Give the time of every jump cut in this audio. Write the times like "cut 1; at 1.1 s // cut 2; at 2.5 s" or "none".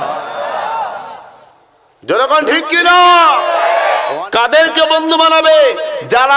cut 1; at 4.1 s